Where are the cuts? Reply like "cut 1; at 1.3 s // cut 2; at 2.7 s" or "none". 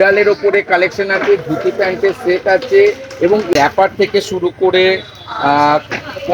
cut 1; at 3.5 s

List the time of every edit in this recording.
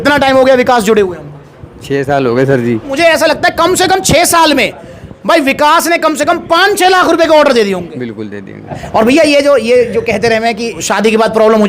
cut 1; at 2.9 s // cut 2; at 8.6 s // cut 3; at 10.8 s

